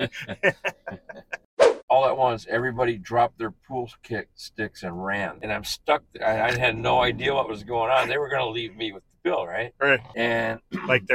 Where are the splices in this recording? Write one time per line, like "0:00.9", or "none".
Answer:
0:01.8
0:05.4
0:10.1